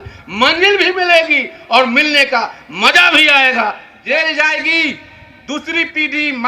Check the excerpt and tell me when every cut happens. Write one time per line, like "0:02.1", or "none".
0:03.9